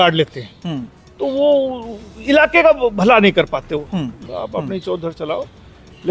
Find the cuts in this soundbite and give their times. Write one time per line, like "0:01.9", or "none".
0:04.2